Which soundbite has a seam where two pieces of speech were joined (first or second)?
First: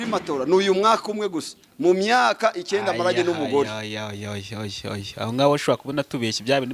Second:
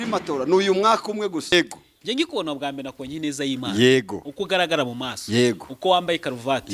second